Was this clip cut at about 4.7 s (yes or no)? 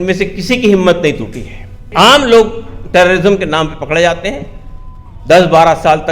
no